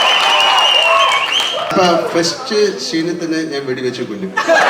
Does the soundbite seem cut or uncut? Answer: cut